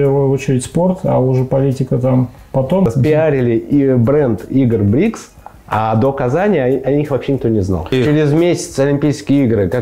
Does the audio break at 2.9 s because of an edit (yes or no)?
yes